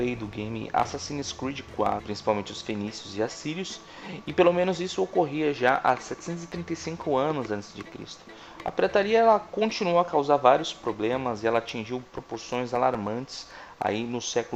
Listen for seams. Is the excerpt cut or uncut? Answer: uncut